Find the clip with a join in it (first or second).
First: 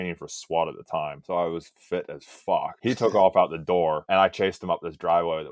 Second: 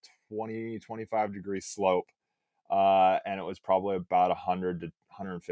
first